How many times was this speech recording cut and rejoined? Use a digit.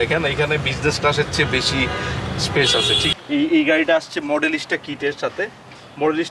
0